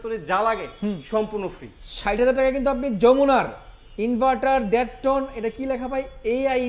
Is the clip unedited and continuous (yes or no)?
yes